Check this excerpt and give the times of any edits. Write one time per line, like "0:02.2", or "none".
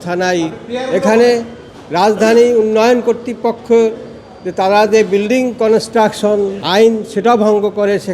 0:06.6